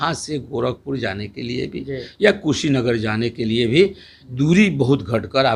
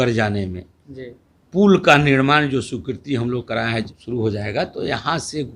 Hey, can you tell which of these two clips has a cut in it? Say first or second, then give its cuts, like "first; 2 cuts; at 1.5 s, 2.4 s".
second; 1 cut; at 3.9 s